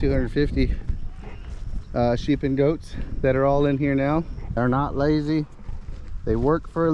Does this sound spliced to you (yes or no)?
yes